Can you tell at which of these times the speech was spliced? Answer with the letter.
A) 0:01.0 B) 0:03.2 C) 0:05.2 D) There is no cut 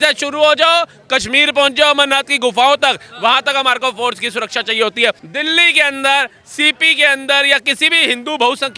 C